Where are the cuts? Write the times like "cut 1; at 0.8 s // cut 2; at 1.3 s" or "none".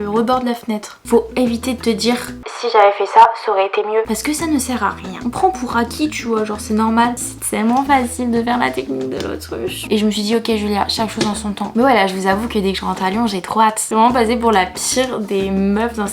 cut 1; at 1.0 s // cut 2; at 5.2 s // cut 3; at 7.2 s // cut 4; at 9.8 s // cut 5; at 11.7 s // cut 6; at 13.8 s